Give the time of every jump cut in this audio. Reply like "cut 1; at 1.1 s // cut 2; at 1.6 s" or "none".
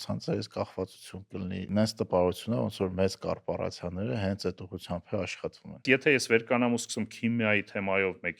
cut 1; at 1.7 s // cut 2; at 5.8 s